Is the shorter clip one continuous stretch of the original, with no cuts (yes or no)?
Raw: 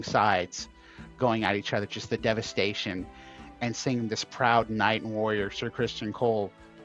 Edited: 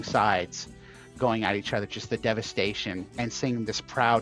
no